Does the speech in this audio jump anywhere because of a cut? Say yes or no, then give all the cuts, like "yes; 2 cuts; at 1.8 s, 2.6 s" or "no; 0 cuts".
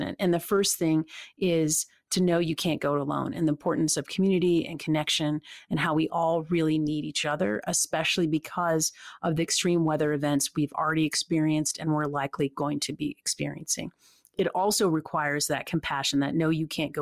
no; 0 cuts